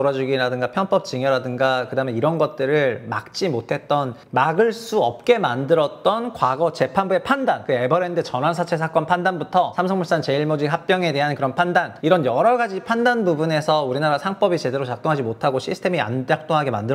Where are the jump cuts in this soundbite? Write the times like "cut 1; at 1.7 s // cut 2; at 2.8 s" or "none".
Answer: cut 1; at 4.2 s // cut 2; at 7.6 s // cut 3; at 9.7 s // cut 4; at 11.9 s